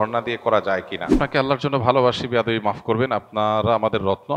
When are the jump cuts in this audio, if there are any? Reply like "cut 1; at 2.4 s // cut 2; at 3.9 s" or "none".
cut 1; at 1.2 s